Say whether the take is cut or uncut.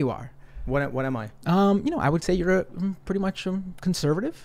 uncut